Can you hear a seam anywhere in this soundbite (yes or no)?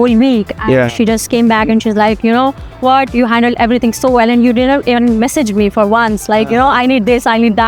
no